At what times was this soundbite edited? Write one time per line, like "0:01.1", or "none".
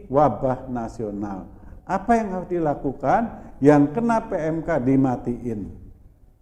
none

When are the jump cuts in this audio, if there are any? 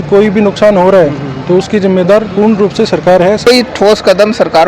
0:03.5

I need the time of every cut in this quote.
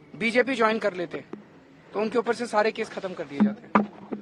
none

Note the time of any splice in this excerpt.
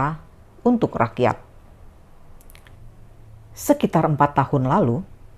0:02.7

